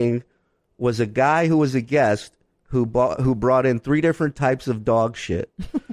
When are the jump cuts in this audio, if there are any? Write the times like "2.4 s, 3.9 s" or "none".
none